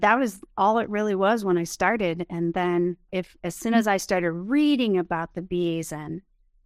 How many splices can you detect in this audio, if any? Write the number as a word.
one